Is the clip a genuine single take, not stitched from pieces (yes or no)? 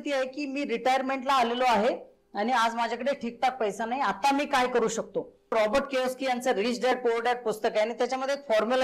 no